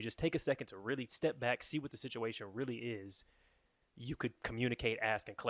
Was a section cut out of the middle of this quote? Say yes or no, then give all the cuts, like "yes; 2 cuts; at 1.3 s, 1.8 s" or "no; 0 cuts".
no; 0 cuts